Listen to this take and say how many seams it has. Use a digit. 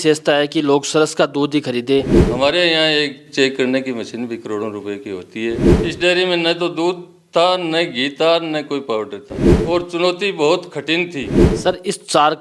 4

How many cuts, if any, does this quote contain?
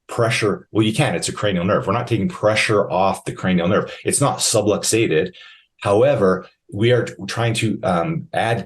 0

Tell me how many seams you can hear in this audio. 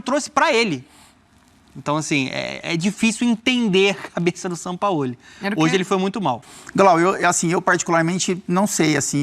1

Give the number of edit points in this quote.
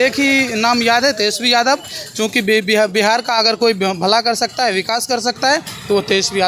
0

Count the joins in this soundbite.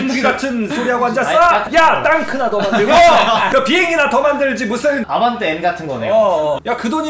2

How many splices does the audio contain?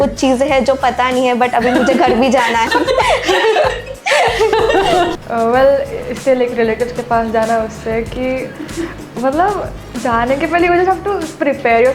2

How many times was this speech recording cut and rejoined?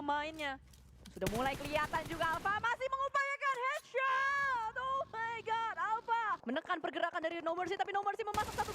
1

